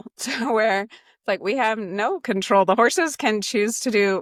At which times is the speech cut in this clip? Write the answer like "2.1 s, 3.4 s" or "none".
none